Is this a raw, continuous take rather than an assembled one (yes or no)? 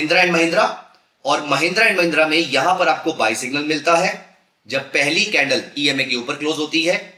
yes